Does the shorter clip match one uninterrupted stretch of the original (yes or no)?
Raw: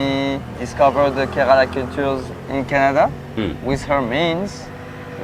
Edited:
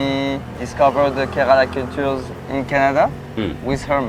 yes